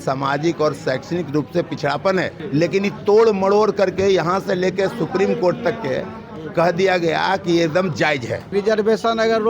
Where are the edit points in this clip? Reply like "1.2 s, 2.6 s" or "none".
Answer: 2.4 s, 8.5 s